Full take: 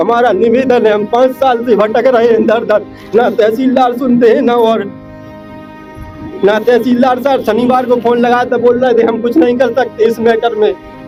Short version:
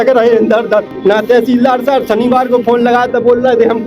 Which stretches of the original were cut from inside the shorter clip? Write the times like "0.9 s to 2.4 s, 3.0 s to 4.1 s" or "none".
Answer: 2.9 s to 6.3 s